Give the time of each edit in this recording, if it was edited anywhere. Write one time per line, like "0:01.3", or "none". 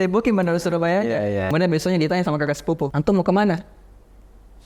0:01.5
0:02.9